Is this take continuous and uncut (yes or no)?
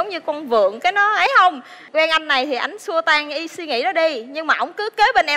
no